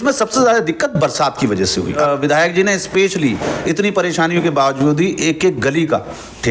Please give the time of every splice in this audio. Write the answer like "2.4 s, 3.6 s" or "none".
2.0 s